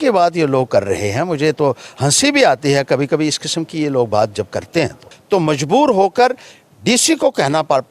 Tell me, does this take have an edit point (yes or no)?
yes